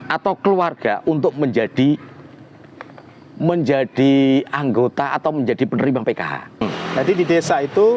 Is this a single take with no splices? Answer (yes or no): no